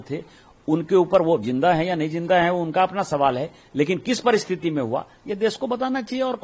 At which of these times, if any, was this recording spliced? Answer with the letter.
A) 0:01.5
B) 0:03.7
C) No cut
C